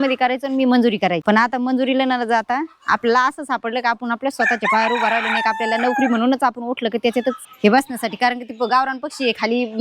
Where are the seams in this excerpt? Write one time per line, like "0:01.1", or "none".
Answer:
0:01.2
0:07.5